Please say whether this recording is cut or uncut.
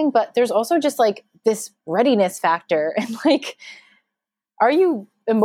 uncut